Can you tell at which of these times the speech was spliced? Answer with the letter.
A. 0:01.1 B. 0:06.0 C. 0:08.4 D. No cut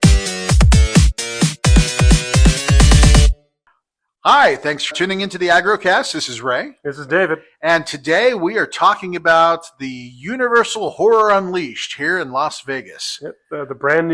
A